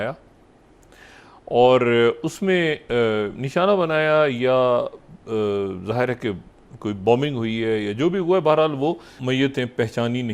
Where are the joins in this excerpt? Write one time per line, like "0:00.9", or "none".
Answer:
0:09.2